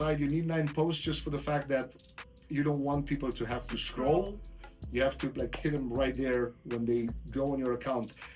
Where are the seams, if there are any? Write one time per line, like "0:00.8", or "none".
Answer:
none

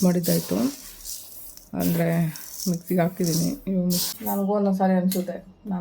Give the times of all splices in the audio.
0:04.0

